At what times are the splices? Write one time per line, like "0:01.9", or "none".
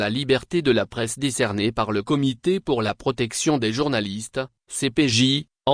0:01.3

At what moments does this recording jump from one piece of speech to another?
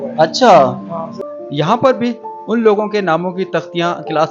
0:01.2

